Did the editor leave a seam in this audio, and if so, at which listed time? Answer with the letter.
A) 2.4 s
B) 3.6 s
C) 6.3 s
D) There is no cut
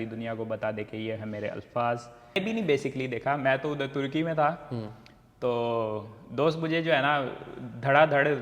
A